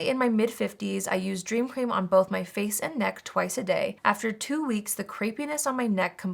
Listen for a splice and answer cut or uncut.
uncut